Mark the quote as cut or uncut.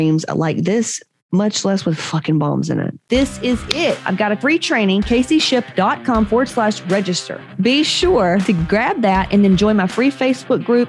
cut